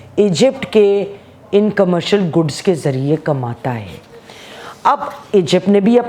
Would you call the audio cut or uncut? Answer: uncut